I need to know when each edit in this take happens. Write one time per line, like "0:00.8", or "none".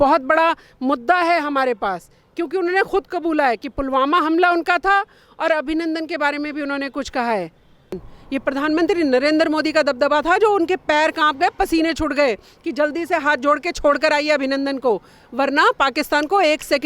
0:08.0